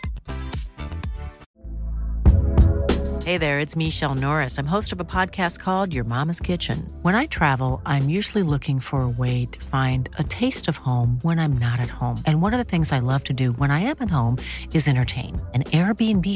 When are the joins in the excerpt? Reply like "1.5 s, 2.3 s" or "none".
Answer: 1.4 s